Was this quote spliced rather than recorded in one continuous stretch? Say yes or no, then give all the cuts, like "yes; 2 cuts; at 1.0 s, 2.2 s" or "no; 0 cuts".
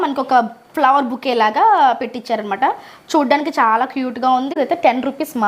yes; 1 cut; at 4.6 s